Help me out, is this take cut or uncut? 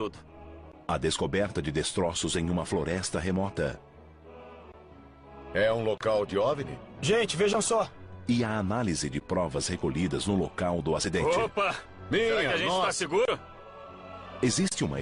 uncut